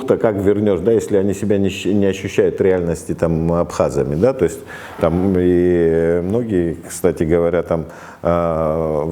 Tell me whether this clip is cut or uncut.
uncut